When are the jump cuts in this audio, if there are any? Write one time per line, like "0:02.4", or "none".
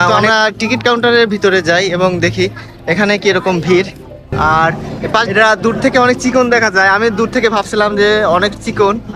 0:04.3